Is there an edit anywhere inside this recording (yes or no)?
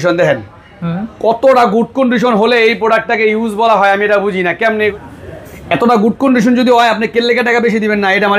yes